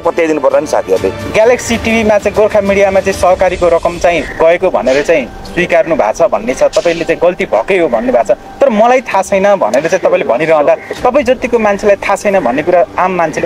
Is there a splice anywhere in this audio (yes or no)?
yes